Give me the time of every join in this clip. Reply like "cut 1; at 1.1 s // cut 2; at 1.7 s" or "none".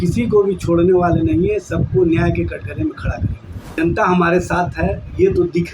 cut 1; at 3.7 s